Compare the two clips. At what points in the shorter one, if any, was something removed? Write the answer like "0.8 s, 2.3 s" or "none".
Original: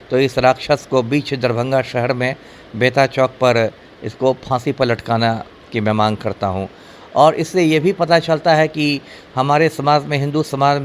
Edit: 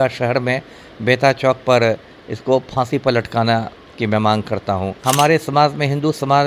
4.9 s